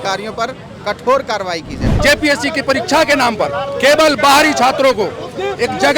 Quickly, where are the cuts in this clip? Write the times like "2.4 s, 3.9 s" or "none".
1.9 s